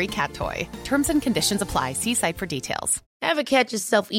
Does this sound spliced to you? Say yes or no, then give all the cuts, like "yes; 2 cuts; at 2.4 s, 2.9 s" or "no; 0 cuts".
yes; 1 cut; at 3.0 s